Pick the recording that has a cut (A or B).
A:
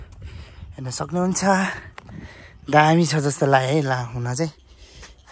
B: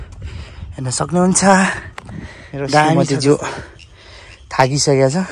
B